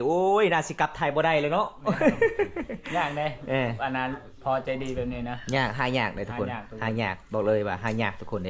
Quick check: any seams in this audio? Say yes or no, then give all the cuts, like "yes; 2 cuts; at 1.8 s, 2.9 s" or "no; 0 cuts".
no; 0 cuts